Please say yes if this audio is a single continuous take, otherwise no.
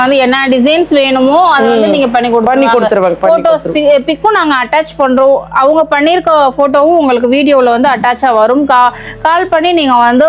yes